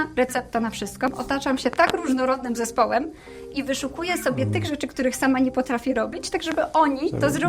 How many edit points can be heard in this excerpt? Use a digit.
1